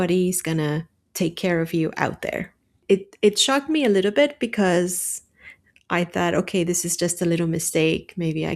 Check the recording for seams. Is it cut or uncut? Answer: cut